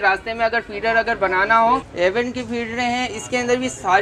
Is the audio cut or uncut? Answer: cut